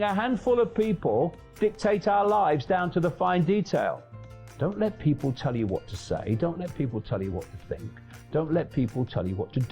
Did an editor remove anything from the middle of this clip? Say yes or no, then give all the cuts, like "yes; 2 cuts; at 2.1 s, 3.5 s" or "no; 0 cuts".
yes; 1 cut; at 4.4 s